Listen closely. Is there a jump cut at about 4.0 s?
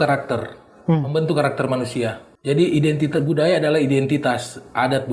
no; 1 cut; at 2.3 s

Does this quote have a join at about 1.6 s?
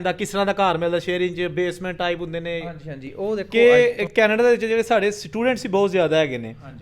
no; 1 cut; at 3.5 s

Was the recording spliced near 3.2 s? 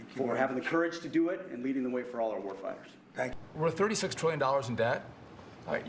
yes; 1 cut; at 3.2 s

